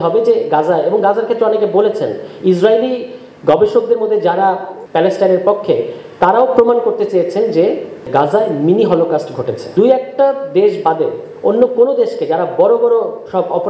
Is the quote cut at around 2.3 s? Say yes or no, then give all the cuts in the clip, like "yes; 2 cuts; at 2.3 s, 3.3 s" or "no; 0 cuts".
no; 3 cuts; at 4.7 s, 8.1 s, 9.6 s